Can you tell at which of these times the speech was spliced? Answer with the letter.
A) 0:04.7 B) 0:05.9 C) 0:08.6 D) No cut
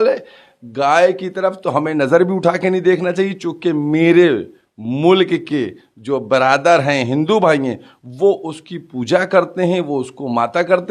D